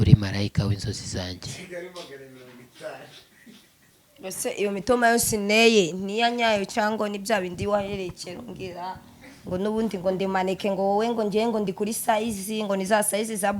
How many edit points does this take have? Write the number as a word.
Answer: zero